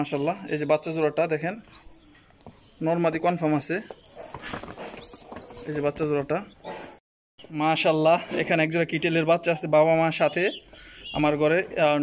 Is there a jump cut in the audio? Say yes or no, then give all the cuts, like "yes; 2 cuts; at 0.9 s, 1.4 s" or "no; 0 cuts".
yes; 1 cut; at 7.0 s